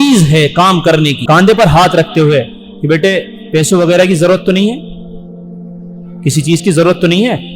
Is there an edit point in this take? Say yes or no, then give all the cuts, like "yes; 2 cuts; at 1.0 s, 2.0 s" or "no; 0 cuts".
yes; 1 cut; at 1.1 s